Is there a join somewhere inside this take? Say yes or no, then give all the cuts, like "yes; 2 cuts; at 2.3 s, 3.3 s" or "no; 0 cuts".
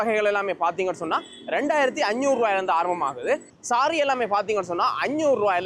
no; 0 cuts